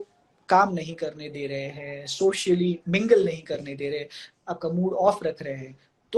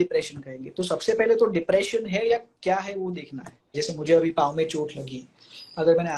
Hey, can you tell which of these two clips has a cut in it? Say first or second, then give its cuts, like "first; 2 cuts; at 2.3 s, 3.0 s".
second; 1 cut; at 3.8 s